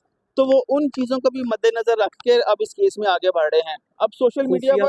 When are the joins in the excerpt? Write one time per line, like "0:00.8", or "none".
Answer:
none